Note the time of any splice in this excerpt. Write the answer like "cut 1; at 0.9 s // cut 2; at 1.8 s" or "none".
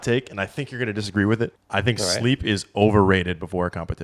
cut 1; at 1.6 s